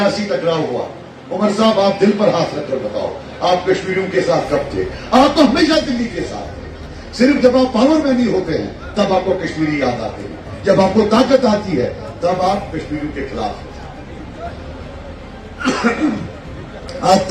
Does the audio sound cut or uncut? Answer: uncut